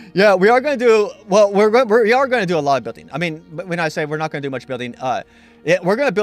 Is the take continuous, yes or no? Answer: yes